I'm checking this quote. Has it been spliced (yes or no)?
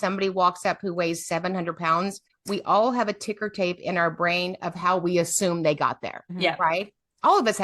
yes